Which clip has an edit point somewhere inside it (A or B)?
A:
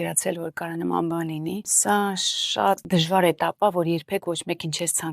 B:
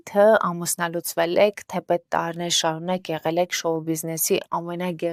A